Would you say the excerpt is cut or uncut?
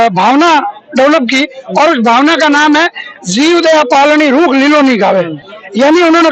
uncut